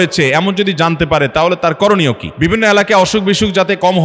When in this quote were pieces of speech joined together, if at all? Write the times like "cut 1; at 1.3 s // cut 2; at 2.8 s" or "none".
cut 1; at 2.3 s